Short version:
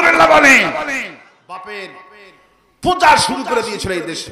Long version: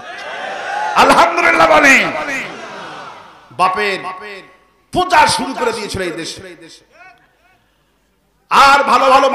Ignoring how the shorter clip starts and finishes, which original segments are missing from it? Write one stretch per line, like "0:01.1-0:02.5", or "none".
0:02.5-0:03.2